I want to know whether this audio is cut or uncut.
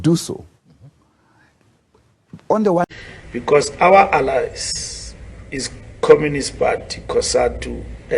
cut